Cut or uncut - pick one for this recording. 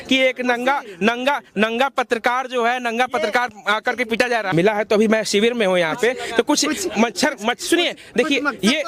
cut